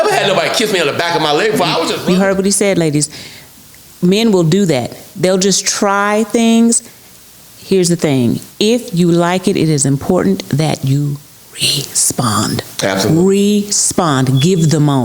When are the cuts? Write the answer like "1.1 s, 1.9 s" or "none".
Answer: 2.0 s

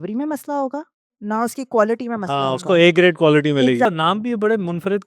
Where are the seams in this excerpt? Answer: 3.9 s

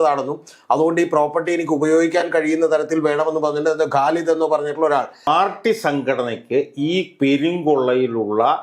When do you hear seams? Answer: 5.3 s

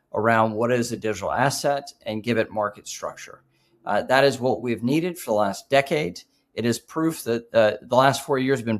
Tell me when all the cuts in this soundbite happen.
none

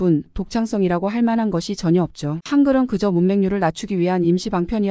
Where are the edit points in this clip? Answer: 2.4 s

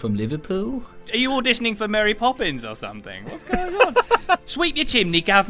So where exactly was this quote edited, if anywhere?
1.1 s, 4.5 s

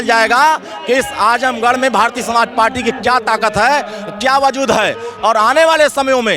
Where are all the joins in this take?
none

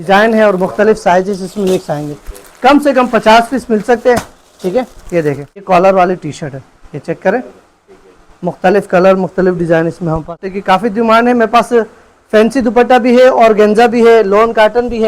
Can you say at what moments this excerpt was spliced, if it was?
5.6 s, 10.4 s

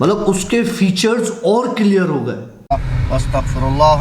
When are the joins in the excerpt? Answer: 2.5 s

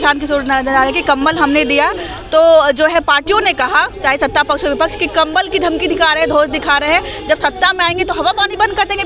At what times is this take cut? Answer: none

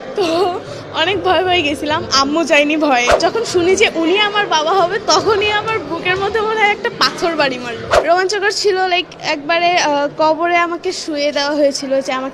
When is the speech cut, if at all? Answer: 3.2 s, 7.9 s

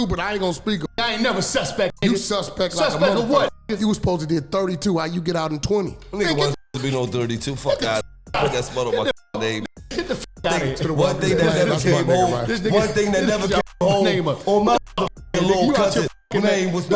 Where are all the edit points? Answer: none

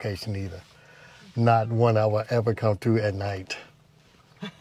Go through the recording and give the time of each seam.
none

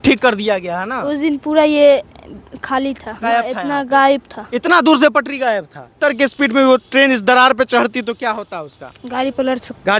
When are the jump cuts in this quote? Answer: 3.1 s, 6.0 s

